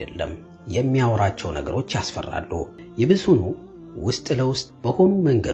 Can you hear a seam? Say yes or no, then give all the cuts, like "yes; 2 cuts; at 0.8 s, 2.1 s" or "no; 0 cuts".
yes; 1 cut; at 2.8 s